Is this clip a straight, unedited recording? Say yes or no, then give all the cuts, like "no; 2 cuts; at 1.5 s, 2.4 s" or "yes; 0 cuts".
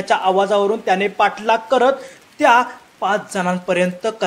yes; 0 cuts